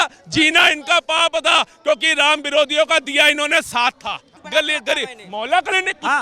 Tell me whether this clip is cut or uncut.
cut